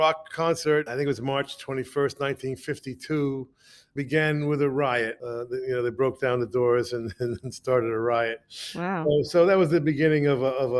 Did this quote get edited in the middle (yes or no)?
yes